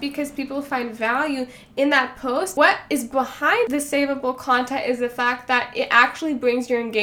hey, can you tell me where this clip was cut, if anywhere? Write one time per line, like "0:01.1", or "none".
0:02.5
0:03.7